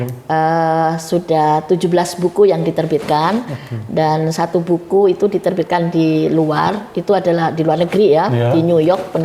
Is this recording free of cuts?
yes; 0 cuts

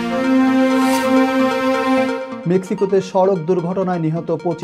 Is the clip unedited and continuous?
no; 1 cut; at 2.3 s

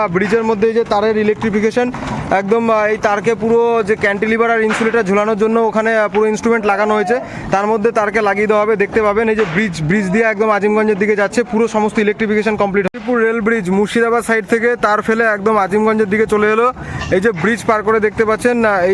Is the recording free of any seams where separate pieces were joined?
yes; 0 cuts

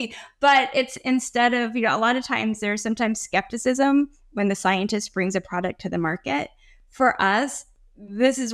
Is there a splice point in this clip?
no; 0 cuts

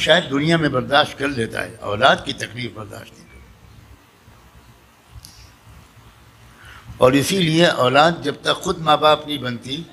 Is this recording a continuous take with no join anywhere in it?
yes; 0 cuts

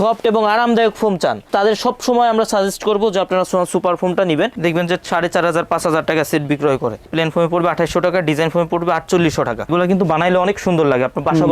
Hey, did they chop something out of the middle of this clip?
yes; 2 cuts; at 4.6 s, 9.7 s

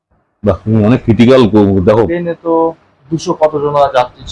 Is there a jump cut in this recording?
yes; 1 cut; at 2.1 s

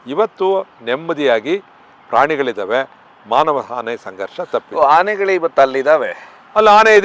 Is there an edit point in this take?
no; 0 cuts

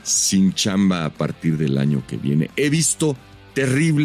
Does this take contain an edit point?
no; 0 cuts

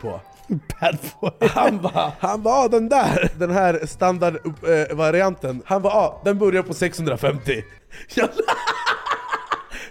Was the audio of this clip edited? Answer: yes; 3 cuts; at 2.1 s, 3.3 s, 5.5 s

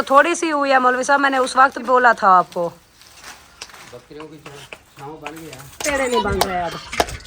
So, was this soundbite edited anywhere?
yes; 2 cuts; at 1.8 s, 5.8 s

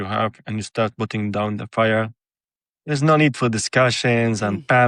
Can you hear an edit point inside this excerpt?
no; 0 cuts

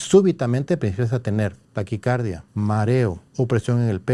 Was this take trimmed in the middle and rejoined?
yes; 3 cuts; at 1.6 s, 2.4 s, 3.2 s

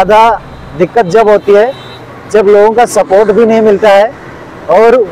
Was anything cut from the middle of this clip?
no; 0 cuts

